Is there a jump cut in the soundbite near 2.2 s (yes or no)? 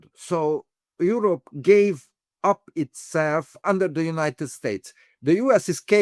no